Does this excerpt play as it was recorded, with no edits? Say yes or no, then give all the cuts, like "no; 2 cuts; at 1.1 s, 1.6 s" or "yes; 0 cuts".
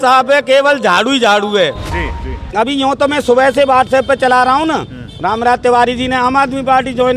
no; 1 cut; at 2.1 s